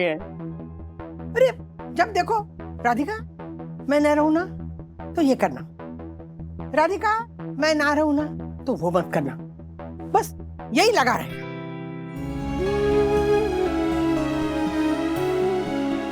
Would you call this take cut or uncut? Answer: cut